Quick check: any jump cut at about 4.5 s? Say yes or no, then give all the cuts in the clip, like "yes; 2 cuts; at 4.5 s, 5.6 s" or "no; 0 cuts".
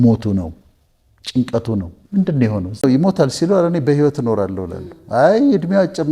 no; 1 cut; at 2.8 s